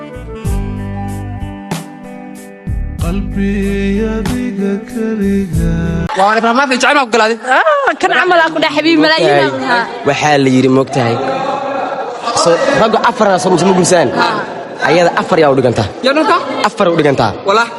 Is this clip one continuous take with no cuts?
yes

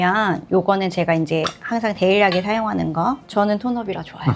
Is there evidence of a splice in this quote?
yes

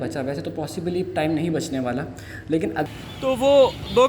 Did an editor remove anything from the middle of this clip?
yes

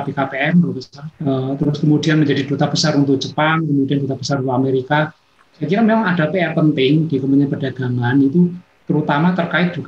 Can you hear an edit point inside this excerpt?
yes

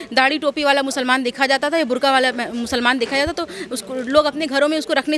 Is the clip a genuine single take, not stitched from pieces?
yes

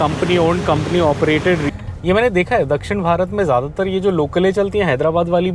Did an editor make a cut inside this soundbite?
yes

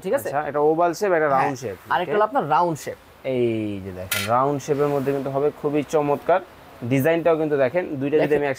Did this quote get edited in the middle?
no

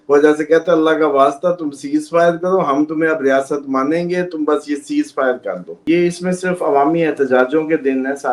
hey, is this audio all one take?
no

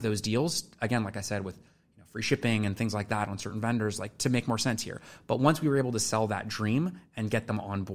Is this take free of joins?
yes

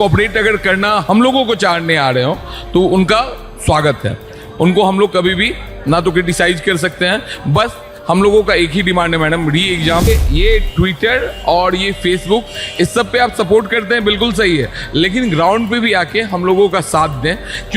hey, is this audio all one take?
no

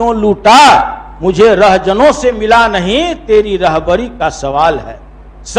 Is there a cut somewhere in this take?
no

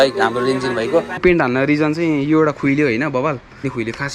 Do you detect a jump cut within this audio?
yes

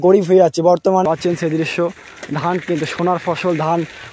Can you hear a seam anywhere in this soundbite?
yes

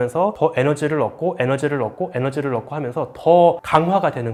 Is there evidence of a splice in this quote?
no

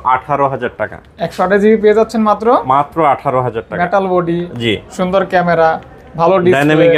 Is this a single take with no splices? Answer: yes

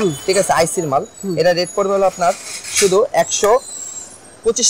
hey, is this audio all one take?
yes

